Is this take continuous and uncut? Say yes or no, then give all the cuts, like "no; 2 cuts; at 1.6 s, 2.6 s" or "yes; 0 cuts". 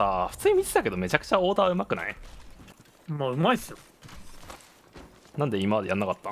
yes; 0 cuts